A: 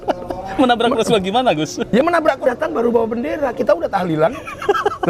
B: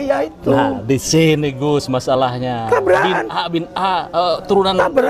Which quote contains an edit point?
A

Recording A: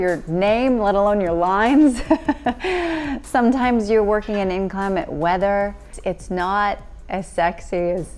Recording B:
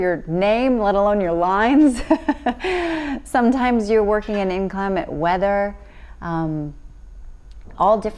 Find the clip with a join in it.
A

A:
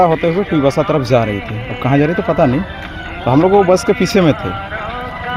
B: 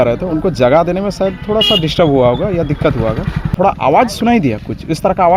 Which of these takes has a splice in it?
B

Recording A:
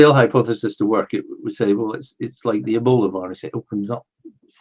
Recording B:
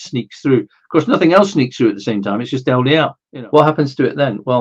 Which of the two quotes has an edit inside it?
B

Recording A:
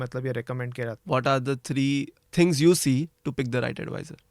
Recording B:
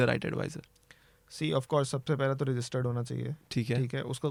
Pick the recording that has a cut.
A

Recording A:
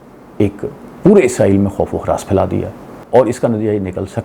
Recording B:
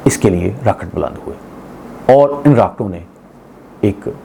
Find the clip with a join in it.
A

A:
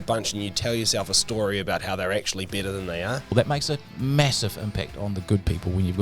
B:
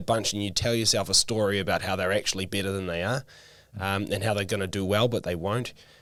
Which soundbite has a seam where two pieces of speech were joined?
A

